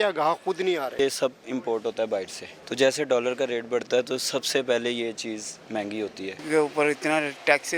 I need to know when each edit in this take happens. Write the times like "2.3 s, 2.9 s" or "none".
1.0 s, 2.6 s, 6.3 s